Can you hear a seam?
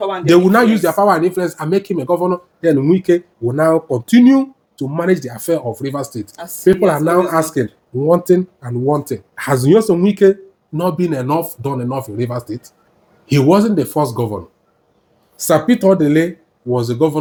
no; 0 cuts

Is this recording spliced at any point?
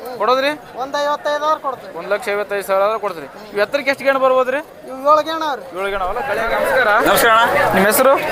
yes; 1 cut; at 6.4 s

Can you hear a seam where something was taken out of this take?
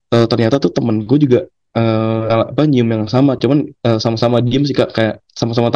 yes; 1 cut; at 2.3 s

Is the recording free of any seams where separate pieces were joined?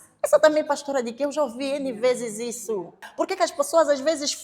no; 1 cut; at 3.1 s

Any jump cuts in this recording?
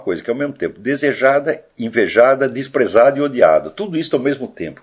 no; 0 cuts

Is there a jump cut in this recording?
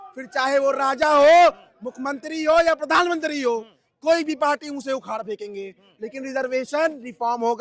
no; 0 cuts

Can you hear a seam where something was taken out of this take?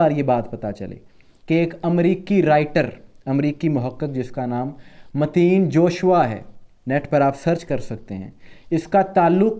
no; 0 cuts

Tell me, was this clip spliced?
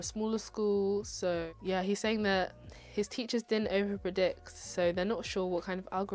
no; 0 cuts

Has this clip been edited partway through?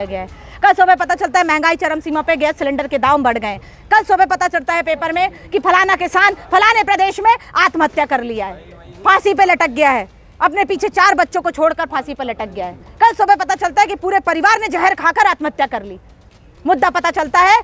no; 0 cuts

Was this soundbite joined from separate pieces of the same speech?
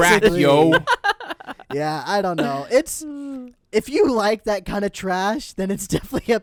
no; 0 cuts

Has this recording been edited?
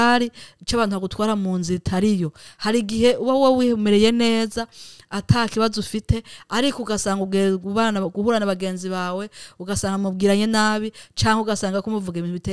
no; 0 cuts

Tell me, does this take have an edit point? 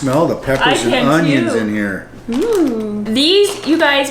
yes; 1 cut; at 3.0 s

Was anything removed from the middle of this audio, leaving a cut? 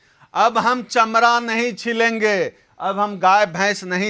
no; 0 cuts

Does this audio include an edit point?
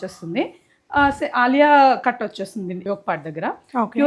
yes; 1 cut; at 2.8 s

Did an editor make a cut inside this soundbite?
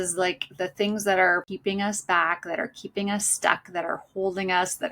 yes; 1 cut; at 1.5 s

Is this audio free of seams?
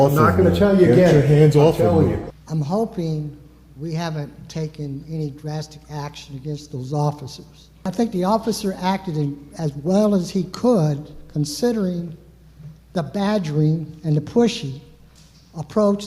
no; 3 cuts; at 2.3 s, 7.9 s, 11.3 s

